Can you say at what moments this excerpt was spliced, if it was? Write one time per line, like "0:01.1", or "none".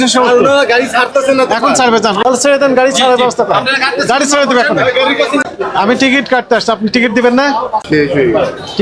0:02.2
0:05.4
0:07.8